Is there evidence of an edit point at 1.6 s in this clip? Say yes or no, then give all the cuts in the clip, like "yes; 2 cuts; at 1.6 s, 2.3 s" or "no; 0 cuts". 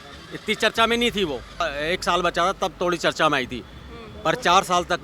yes; 1 cut; at 1.6 s